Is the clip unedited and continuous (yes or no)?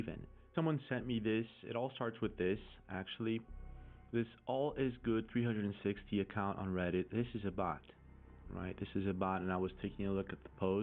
yes